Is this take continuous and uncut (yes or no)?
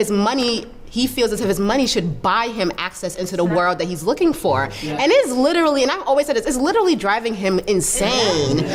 yes